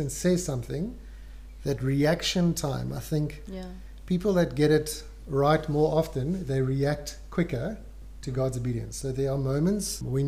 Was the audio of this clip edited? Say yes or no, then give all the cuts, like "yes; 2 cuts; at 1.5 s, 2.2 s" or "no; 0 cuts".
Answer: no; 0 cuts